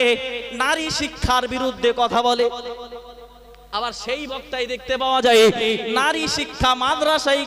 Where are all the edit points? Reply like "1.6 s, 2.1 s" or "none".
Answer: none